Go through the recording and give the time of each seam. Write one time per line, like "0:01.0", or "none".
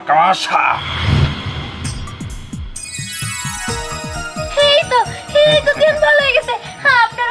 none